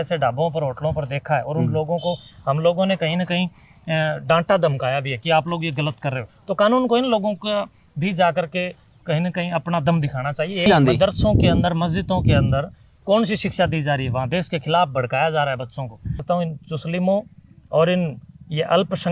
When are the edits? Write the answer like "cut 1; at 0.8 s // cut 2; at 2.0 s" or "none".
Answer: cut 1; at 10.7 s // cut 2; at 16.2 s